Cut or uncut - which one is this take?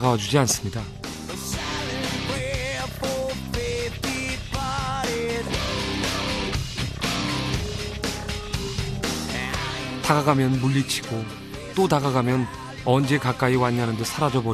uncut